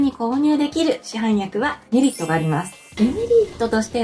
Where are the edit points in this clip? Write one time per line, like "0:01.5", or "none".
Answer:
0:02.8